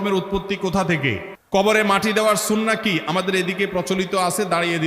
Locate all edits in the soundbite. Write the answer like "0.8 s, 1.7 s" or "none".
1.3 s